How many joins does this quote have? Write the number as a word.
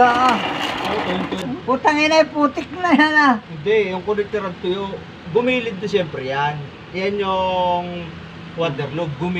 one